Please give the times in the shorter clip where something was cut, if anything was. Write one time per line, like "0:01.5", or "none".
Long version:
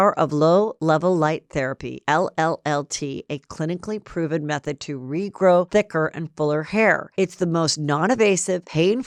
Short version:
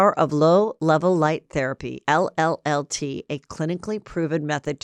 none